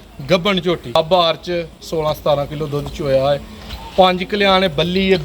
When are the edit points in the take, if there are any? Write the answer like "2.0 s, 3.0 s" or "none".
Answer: 0.9 s